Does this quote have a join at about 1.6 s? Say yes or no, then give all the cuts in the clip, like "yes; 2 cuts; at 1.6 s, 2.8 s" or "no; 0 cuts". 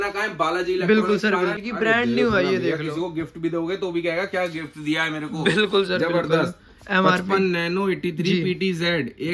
yes; 1 cut; at 1.6 s